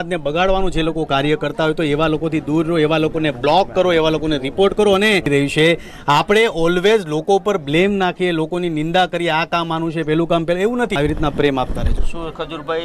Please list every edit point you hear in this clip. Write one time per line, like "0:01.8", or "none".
0:05.3
0:10.9

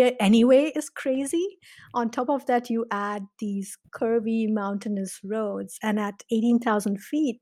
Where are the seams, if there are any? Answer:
none

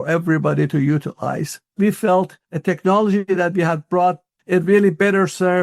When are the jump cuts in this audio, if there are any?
0:01.7
0:02.4
0:04.3

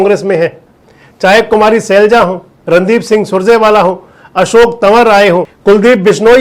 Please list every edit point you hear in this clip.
0:05.5

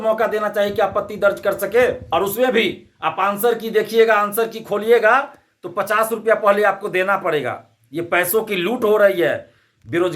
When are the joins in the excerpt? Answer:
0:02.0

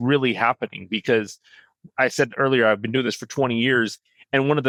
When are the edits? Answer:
none

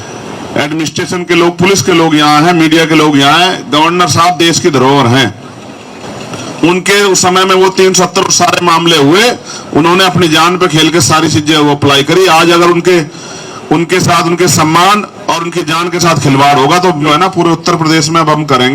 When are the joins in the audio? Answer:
0:17.1

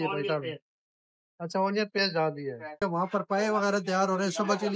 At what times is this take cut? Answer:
0:02.8

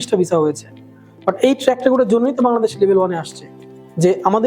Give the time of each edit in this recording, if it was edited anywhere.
none

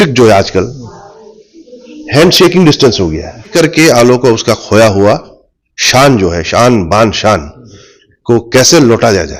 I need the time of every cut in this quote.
0:03.5

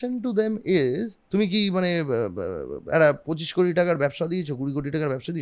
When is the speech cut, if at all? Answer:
0:01.2

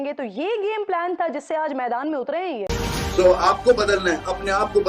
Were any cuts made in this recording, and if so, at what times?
0:02.7

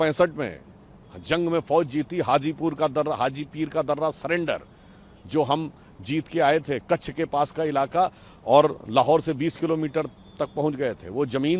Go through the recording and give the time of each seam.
none

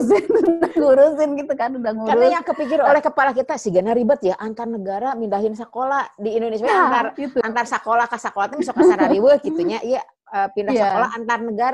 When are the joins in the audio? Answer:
none

